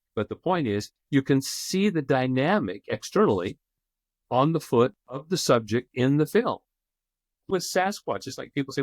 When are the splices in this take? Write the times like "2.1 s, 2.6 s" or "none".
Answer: 7.4 s